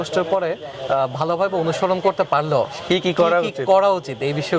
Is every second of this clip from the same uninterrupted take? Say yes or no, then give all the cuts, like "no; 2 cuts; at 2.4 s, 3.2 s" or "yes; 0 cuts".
yes; 0 cuts